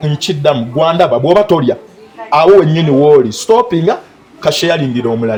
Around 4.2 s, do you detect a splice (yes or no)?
no